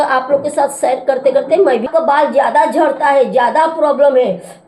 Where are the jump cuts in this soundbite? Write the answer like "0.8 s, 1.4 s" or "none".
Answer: 1.9 s